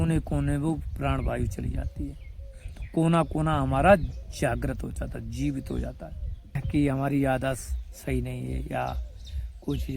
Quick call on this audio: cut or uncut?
cut